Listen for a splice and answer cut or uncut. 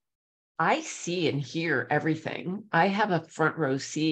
uncut